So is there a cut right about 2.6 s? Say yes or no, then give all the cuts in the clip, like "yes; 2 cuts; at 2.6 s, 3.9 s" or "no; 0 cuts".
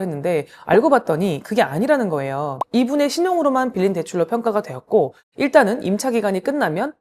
no; 0 cuts